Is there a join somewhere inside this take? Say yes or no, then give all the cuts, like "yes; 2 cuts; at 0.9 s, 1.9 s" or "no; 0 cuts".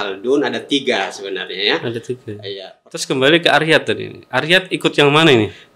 yes; 1 cut; at 3.0 s